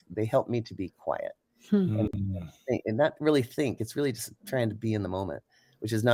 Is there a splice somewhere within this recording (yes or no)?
no